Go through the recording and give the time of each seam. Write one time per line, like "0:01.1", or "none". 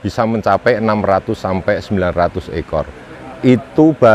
none